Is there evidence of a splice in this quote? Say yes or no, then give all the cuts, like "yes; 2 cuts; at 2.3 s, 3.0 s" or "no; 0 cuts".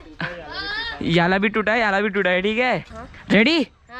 yes; 1 cut; at 2.9 s